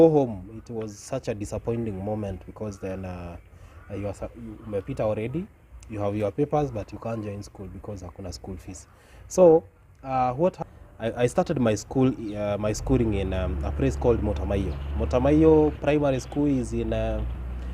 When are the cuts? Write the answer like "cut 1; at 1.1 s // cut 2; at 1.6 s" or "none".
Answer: cut 1; at 10.6 s